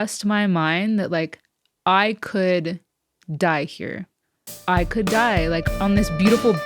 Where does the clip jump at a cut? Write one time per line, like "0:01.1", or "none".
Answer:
0:05.7